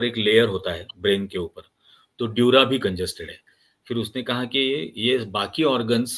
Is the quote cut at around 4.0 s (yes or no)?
no